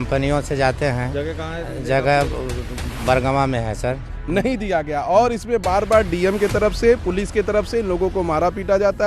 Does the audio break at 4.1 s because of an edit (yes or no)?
yes